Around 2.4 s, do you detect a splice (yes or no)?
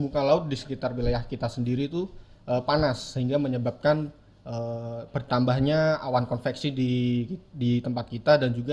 no